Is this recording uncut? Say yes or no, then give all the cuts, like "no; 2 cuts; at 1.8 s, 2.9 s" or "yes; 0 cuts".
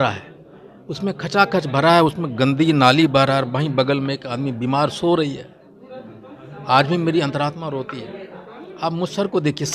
yes; 0 cuts